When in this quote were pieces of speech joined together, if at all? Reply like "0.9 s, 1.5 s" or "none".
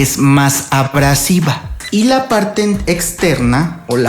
1.7 s